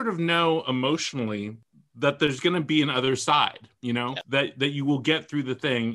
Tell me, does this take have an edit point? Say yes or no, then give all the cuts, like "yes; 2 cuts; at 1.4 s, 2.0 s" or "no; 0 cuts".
yes; 2 cuts; at 1.6 s, 4.2 s